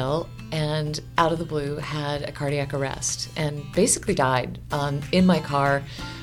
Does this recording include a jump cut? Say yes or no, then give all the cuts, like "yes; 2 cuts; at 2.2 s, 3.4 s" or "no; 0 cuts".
yes; 1 cut; at 4.6 s